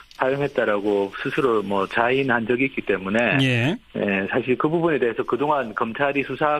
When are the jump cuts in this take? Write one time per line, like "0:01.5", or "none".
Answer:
0:03.5